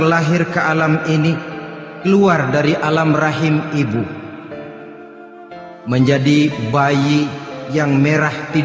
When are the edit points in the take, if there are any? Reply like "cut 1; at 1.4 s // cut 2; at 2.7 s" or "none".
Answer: cut 1; at 4.5 s // cut 2; at 5.9 s